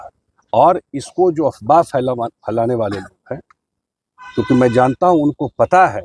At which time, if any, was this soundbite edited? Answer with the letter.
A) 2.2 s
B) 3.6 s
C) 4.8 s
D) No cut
D